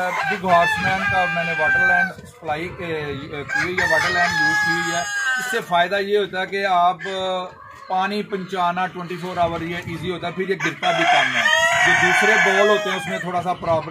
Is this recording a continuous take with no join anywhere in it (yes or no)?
yes